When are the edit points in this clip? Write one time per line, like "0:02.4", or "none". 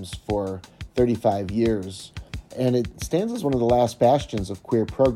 0:02.5